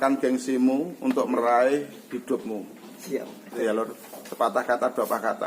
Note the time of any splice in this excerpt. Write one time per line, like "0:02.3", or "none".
0:03.6